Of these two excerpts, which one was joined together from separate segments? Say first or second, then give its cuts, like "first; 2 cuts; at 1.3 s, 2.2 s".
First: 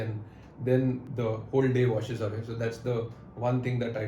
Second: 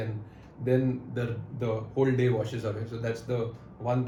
first; 1 cut; at 1.0 s